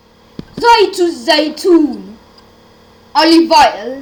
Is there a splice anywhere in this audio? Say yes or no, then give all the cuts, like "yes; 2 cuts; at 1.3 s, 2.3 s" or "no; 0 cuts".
no; 0 cuts